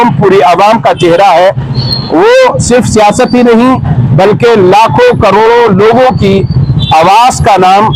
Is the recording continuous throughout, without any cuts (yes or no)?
yes